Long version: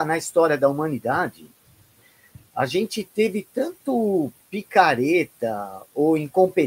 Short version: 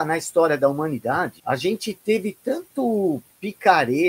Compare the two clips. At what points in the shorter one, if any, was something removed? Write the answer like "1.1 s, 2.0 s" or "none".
1.4 s